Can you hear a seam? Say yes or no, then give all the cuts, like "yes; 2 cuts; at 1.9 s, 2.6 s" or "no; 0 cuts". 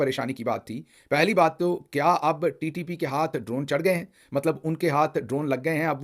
no; 0 cuts